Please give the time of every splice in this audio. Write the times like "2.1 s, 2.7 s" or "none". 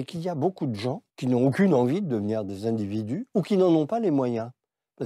1.1 s